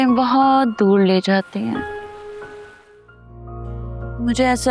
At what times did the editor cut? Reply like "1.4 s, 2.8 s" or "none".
3.5 s